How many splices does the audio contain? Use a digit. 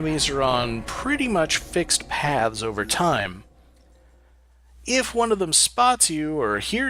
0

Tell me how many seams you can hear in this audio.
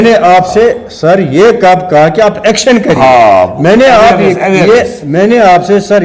0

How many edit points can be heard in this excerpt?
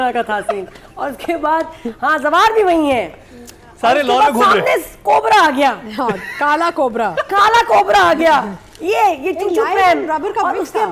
0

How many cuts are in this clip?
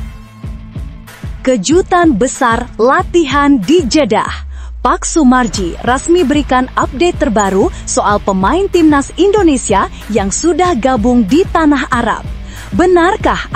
1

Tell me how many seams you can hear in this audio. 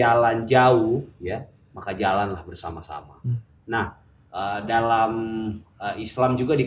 0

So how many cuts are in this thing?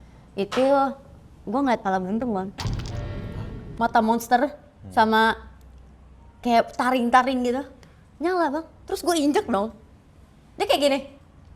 1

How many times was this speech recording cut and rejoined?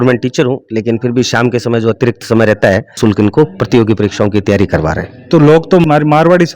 2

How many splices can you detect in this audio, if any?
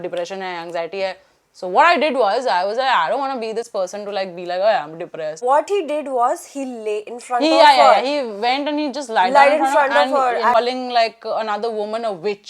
2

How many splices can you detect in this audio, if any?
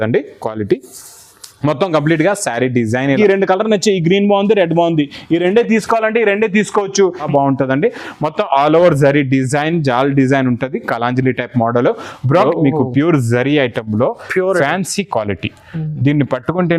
3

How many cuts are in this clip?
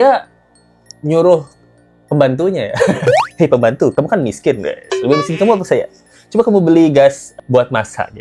0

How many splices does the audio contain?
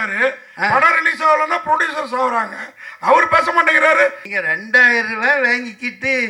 1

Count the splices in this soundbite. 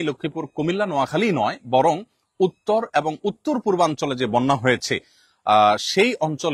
0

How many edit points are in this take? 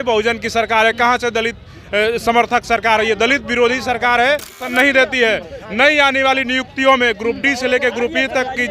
1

